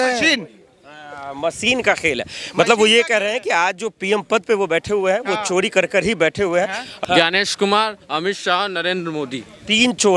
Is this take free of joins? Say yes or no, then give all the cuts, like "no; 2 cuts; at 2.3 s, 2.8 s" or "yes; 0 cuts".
no; 1 cut; at 6.8 s